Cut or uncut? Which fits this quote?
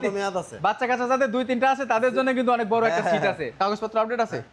cut